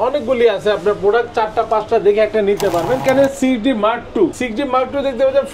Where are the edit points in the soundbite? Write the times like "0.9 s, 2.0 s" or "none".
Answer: 3.0 s, 4.4 s